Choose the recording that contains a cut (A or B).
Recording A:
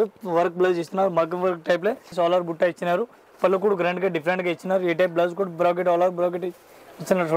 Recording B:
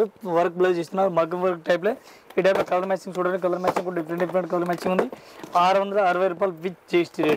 A